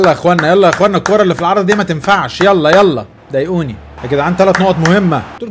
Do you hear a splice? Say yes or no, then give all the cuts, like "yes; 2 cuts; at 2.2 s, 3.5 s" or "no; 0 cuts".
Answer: yes; 1 cut; at 3.9 s